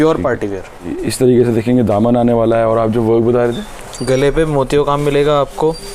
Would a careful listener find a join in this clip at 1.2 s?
yes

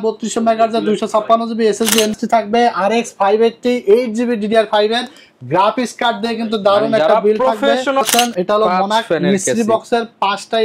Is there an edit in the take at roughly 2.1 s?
yes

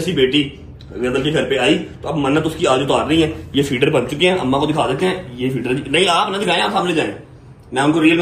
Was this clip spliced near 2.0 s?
no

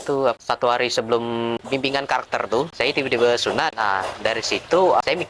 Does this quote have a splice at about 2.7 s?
yes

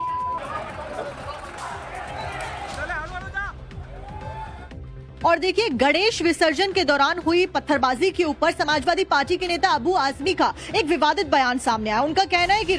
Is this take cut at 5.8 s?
no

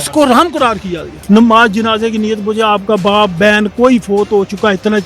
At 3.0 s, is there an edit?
no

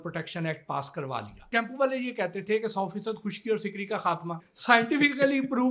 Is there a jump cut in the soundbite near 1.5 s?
yes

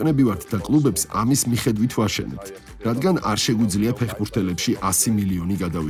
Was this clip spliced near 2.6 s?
no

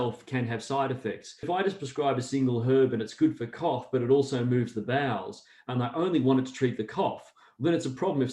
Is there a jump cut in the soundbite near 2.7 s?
no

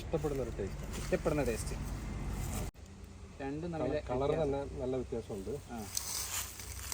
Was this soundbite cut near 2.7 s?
yes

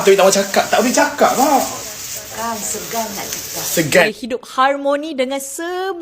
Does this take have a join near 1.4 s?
no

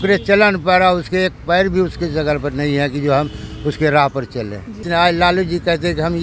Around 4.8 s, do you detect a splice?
yes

